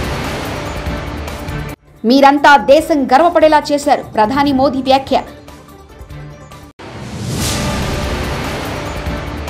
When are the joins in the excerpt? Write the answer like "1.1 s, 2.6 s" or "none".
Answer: 1.8 s

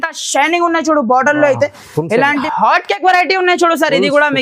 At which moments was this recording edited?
2.4 s

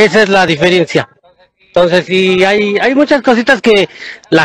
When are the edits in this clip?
none

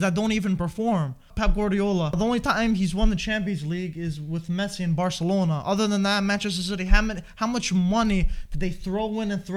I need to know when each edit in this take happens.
1.3 s, 2.2 s

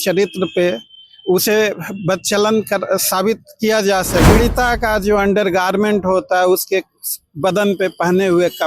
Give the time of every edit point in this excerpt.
4.3 s

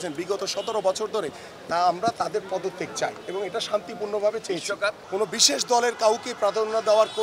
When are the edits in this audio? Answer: 5.0 s

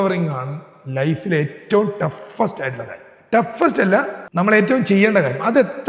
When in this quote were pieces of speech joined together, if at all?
4.2 s

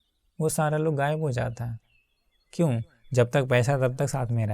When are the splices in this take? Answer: none

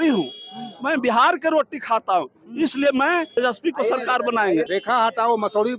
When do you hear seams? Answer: 3.3 s, 4.7 s

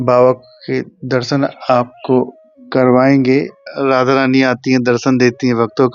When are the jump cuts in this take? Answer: 3.6 s

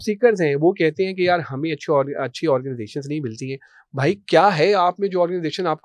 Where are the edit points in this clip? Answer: none

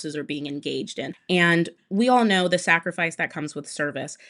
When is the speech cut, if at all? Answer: 1.2 s

